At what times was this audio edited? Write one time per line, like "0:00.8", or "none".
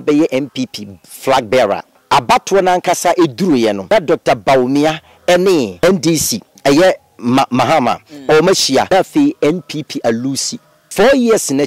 0:01.9
0:03.9
0:06.0
0:08.9
0:10.8

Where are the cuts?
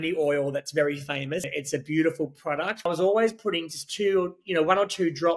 0:01.5
0:02.8

